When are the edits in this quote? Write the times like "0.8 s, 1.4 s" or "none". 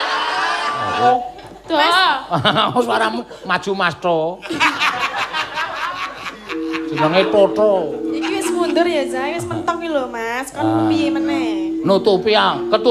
1.0 s